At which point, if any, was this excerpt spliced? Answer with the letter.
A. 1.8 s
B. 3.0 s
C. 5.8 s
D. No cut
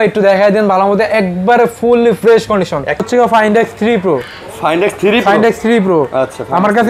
B